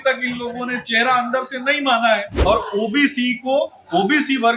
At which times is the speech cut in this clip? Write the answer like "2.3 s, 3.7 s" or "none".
2.3 s